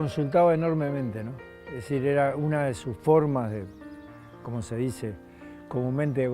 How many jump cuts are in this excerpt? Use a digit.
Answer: 0